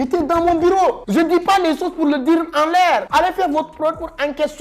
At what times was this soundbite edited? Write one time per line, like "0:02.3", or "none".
none